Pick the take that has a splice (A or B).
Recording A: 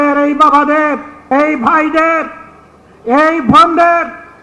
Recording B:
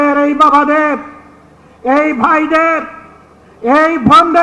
A